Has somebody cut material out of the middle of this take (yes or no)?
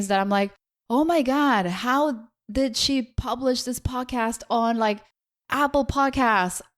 no